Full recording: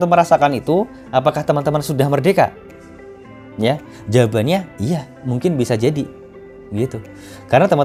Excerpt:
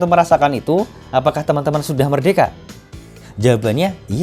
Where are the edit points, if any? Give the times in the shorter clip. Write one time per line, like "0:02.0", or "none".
0:03.2